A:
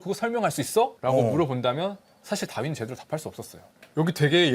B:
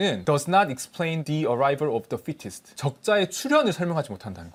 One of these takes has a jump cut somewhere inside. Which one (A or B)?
A